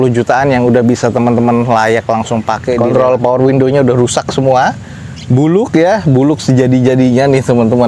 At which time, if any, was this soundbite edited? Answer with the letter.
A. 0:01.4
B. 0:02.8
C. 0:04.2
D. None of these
B